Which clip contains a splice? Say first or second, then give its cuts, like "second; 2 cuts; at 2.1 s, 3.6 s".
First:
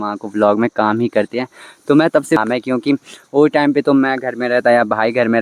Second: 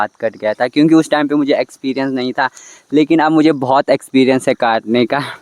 first; 1 cut; at 2.4 s